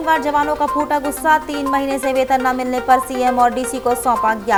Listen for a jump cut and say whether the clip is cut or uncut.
uncut